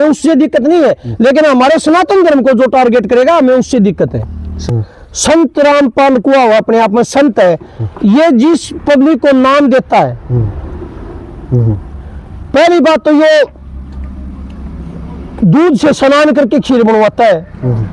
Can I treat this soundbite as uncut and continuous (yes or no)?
no